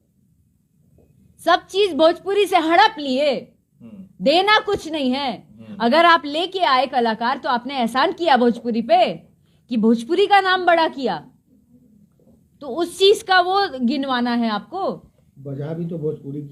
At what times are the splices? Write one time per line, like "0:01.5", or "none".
none